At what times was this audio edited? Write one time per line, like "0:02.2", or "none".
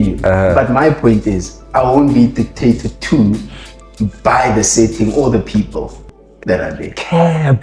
none